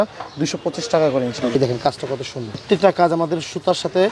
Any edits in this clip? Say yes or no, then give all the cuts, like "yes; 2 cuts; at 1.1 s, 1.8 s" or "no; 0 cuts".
yes; 1 cut; at 1.5 s